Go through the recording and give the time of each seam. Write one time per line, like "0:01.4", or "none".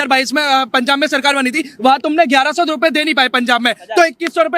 none